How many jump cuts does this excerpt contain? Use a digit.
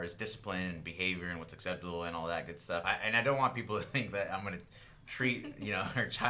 1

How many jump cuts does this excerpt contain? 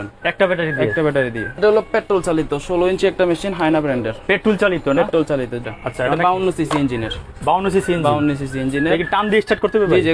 2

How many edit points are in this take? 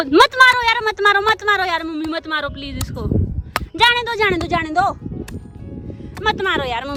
0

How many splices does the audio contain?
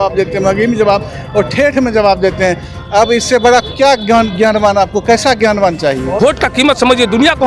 1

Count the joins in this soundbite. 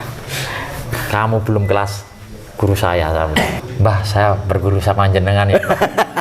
1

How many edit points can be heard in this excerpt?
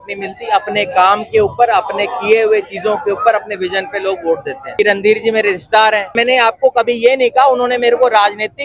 2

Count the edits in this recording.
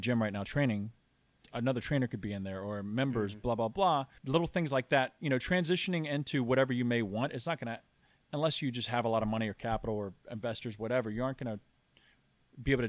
1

